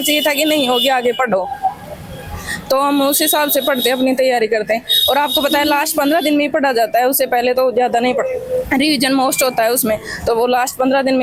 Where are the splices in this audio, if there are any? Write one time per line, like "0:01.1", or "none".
none